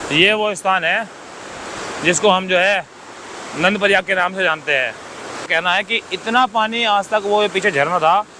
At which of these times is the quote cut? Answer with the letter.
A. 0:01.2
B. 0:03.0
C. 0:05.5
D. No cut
C